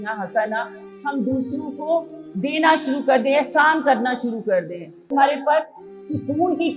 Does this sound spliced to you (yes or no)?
yes